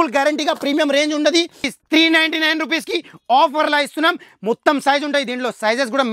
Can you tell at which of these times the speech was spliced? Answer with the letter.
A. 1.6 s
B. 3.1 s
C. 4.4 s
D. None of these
A